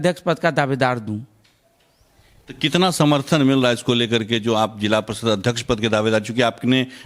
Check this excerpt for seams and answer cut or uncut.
uncut